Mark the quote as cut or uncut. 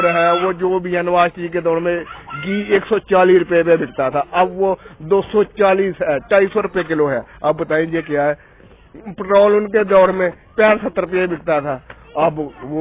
uncut